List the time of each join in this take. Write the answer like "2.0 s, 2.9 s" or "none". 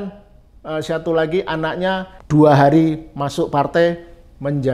2.1 s